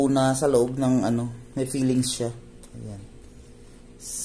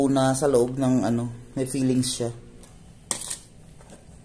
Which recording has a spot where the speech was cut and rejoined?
second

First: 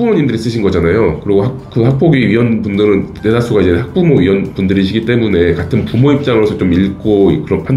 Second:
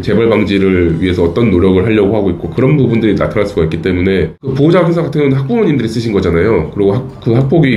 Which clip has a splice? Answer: second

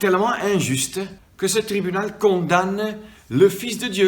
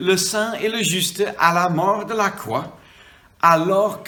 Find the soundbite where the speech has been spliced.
first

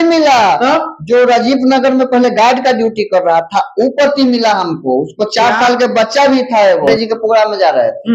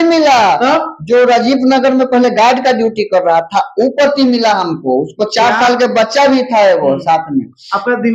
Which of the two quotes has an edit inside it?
first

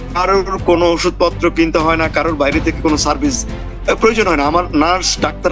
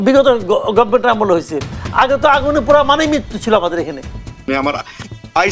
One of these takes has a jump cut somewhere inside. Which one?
second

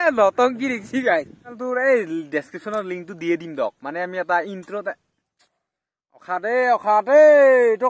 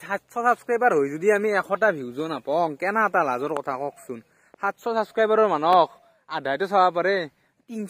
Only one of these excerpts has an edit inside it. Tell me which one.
first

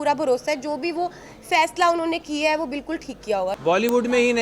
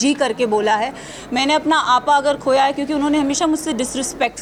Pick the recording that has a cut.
first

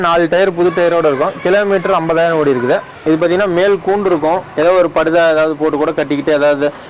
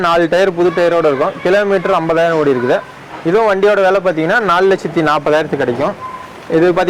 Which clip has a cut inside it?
first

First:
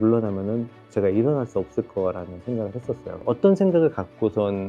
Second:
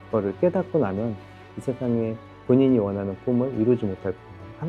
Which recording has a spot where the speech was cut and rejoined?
first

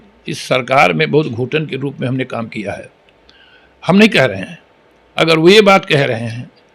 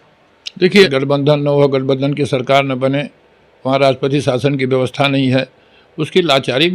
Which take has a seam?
second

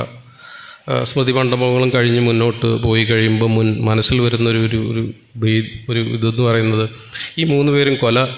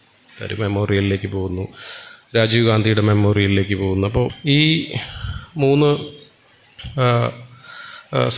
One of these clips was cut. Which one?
second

